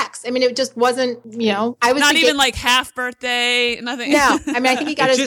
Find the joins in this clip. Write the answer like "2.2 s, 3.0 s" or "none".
1.2 s